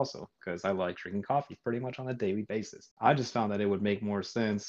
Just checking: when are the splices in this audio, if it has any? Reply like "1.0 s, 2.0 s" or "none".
2.9 s